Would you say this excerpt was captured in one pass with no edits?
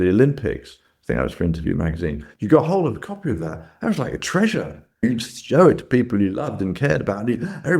yes; 0 cuts

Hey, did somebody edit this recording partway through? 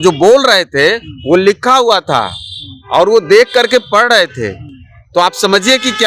no; 0 cuts

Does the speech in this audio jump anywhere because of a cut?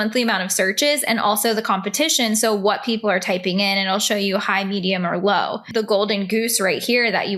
yes; 1 cut; at 5.7 s

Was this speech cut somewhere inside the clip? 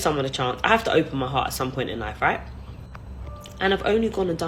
no; 0 cuts

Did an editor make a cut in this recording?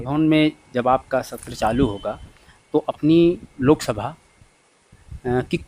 no; 0 cuts

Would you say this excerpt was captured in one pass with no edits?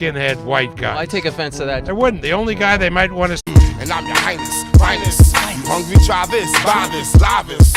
yes; 0 cuts

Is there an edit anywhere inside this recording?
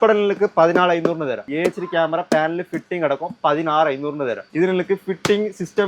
yes; 2 cuts; at 1.4 s, 4.4 s

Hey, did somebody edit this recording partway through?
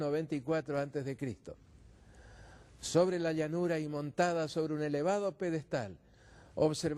yes; 1 cut; at 2.2 s

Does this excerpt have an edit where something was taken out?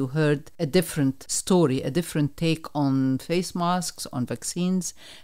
yes; 1 cut; at 0.9 s

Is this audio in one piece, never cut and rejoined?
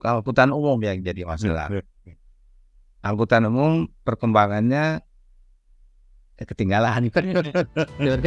yes; 0 cuts

